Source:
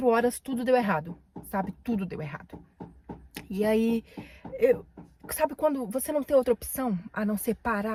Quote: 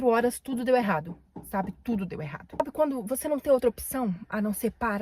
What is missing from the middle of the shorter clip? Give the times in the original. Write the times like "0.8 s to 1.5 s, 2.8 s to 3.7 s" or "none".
2.6 s to 5.4 s